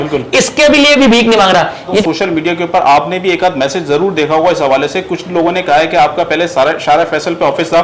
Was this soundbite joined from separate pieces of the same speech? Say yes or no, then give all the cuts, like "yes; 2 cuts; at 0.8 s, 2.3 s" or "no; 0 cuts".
yes; 1 cut; at 2.0 s